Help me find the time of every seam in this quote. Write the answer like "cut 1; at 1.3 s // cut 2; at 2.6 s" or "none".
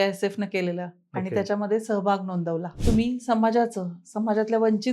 cut 1; at 2.7 s